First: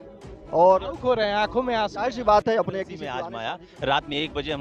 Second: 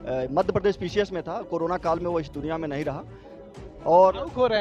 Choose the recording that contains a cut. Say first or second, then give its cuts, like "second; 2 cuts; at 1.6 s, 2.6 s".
first; 1 cut; at 3.1 s